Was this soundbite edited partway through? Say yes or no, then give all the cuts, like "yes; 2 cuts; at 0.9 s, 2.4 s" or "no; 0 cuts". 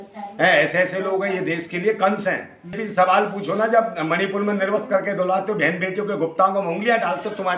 yes; 1 cut; at 2.8 s